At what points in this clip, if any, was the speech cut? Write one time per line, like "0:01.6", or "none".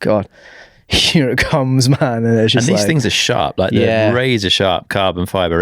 none

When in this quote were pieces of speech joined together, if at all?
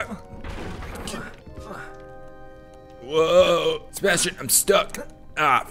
0:01.4
0:03.9

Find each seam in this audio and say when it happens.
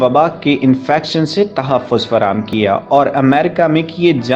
none

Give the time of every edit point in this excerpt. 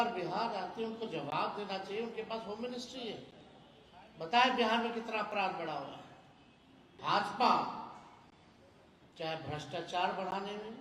0:06.9

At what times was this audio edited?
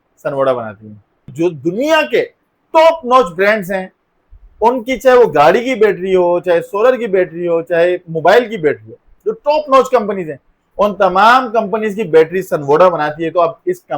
0:01.2

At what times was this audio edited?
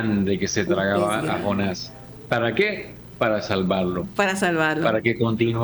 none

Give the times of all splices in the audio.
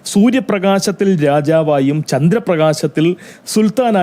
none

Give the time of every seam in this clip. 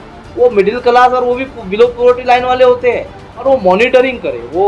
0:03.4

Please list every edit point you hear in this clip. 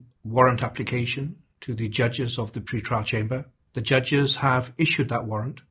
0:03.6

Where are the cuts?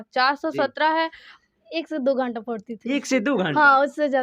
0:01.3

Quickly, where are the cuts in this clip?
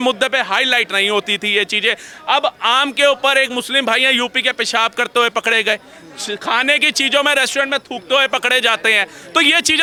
none

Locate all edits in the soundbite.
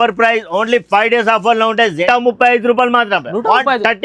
0:02.0

